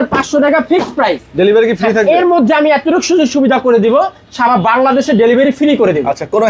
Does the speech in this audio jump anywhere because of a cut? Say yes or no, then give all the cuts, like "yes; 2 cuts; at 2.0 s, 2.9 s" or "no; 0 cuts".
no; 0 cuts